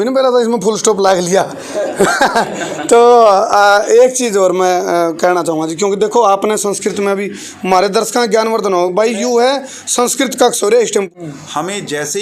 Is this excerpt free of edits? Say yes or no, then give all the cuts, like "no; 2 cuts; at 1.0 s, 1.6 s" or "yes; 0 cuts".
no; 1 cut; at 11.1 s